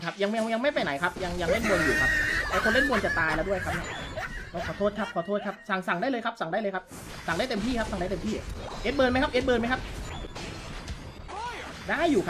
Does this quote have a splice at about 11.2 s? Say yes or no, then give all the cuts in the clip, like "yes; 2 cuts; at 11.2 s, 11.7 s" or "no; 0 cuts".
yes; 1 cut; at 11.2 s